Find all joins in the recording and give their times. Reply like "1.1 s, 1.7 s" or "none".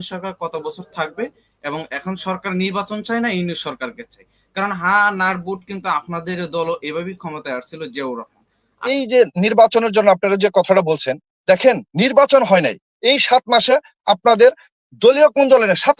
8.8 s